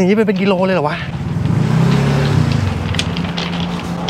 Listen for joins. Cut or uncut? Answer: uncut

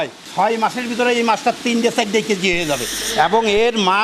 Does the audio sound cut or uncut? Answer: cut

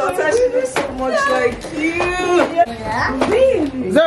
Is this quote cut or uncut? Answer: cut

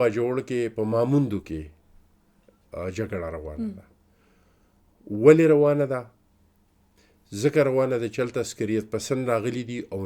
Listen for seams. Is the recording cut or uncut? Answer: uncut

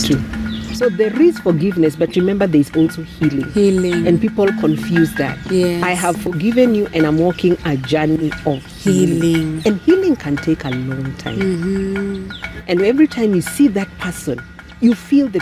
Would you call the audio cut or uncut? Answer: uncut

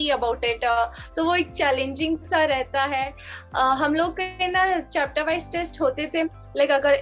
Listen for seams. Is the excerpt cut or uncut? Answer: uncut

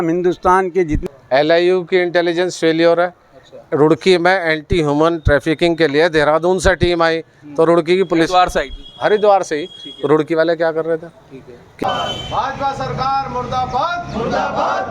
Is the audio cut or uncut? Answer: cut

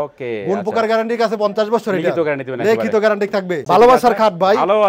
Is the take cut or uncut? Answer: cut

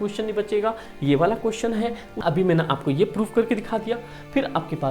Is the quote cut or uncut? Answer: cut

